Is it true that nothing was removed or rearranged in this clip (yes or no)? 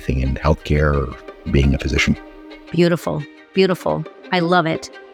yes